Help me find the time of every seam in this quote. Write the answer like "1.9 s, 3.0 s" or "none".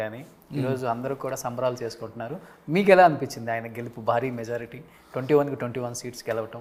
none